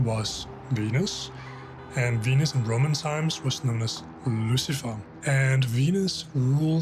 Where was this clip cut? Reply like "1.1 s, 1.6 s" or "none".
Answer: 5.1 s